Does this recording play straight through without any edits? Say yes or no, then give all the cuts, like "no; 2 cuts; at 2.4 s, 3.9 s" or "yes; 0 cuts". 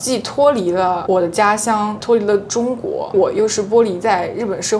no; 2 cuts; at 2.0 s, 3.1 s